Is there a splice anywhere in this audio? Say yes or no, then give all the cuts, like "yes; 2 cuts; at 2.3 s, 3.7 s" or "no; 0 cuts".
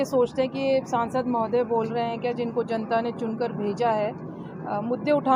no; 0 cuts